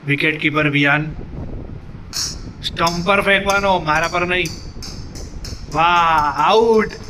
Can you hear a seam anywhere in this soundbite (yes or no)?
no